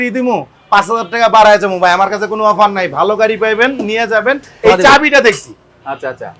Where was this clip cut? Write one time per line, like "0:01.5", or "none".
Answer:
0:04.5